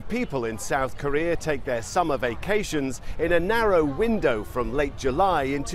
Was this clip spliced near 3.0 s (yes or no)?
yes